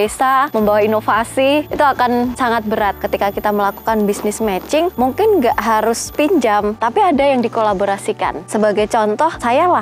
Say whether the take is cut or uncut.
cut